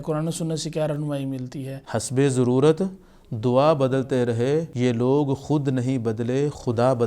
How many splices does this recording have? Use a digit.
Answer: 2